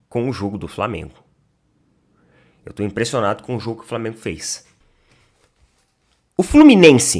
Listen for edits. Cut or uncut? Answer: uncut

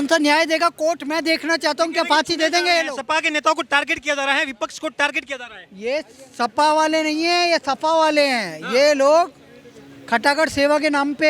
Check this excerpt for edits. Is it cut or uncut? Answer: uncut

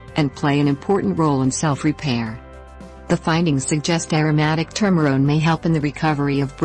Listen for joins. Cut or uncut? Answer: uncut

